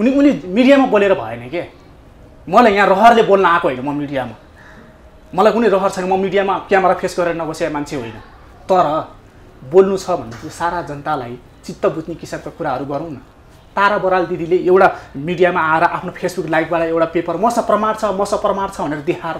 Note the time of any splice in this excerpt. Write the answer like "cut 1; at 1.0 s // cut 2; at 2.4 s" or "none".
none